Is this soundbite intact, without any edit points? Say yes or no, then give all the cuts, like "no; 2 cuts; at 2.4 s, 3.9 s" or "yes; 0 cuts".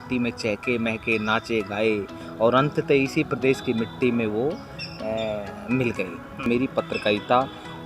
no; 1 cut; at 6.5 s